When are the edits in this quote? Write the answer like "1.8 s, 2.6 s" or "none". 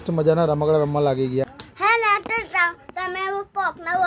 1.6 s